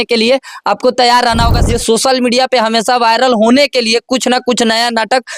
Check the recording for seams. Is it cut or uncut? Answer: cut